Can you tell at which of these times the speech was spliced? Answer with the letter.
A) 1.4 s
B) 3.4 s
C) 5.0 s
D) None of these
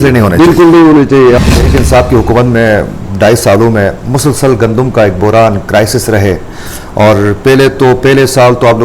A